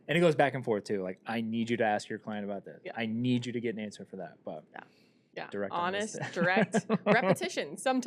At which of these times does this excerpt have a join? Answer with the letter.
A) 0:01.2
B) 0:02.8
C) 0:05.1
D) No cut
C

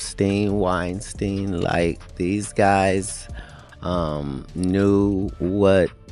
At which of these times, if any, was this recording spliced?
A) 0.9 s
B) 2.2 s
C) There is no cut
C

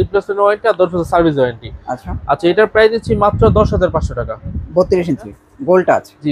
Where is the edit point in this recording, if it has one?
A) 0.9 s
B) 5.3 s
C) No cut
B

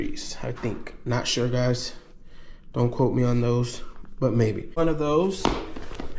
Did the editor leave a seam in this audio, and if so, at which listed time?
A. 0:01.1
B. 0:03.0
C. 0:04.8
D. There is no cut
C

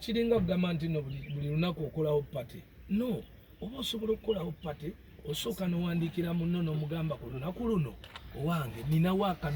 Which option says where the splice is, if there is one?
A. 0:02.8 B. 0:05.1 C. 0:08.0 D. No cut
D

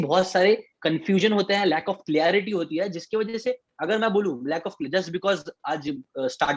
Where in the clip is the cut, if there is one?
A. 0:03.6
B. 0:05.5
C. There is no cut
C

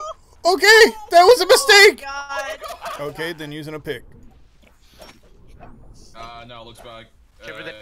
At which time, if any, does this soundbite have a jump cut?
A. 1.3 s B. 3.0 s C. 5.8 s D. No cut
B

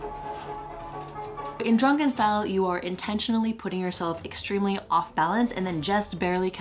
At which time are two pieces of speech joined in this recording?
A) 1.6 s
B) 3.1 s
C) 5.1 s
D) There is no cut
A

